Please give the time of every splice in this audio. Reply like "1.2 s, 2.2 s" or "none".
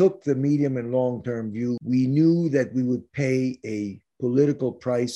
1.8 s